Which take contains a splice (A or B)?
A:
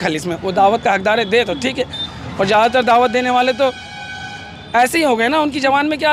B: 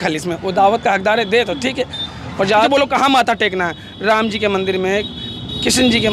B